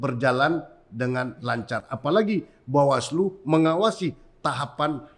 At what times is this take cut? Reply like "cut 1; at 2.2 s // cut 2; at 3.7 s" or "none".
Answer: none